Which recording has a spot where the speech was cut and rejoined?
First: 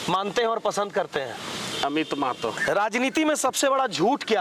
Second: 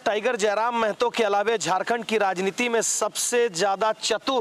first; 1 cut; at 2.6 s

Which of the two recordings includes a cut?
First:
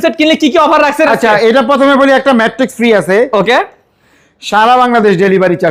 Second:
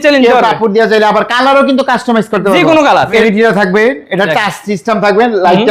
second; 1 cut; at 3.2 s

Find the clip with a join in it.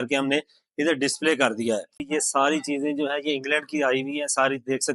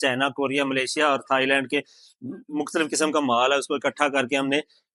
first; 1 cut; at 2.0 s

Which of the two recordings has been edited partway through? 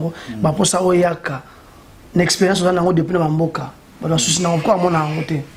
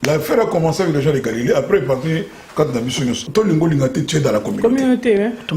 second; 1 cut; at 3.2 s

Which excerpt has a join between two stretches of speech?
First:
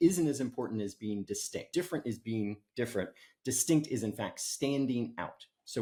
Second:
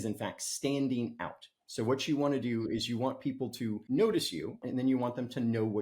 second; 2 cuts; at 3.8 s, 4.6 s

